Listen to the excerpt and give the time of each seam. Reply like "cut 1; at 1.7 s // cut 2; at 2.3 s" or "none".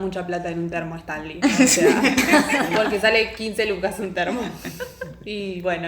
none

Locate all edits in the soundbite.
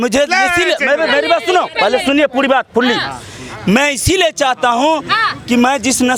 none

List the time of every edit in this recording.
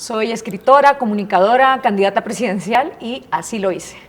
cut 1; at 2.8 s

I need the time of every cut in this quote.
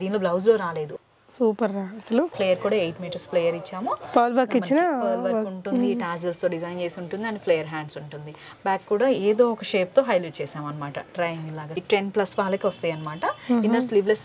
cut 1; at 0.9 s // cut 2; at 2.3 s // cut 3; at 11.8 s

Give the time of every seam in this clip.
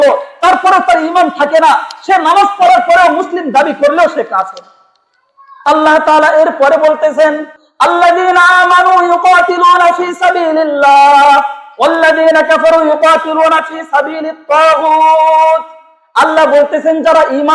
cut 1; at 5.6 s

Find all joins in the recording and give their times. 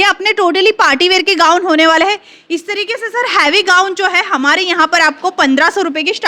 none

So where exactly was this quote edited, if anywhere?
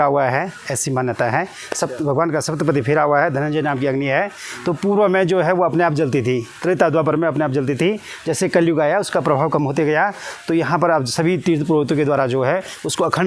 none

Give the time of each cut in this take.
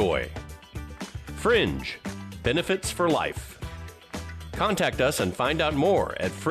none

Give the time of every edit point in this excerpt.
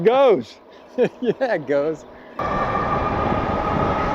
cut 1; at 2.4 s

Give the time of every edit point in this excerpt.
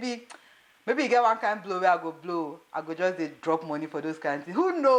none

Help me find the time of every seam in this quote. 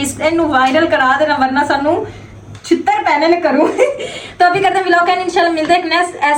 none

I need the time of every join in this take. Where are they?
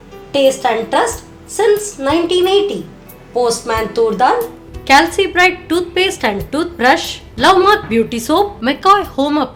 none

